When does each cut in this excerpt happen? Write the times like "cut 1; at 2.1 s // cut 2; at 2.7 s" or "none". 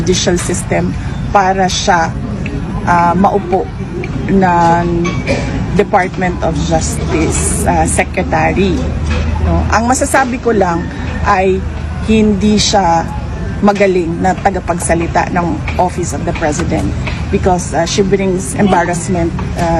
none